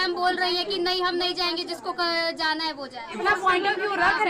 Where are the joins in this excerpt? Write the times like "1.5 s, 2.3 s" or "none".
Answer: 3.2 s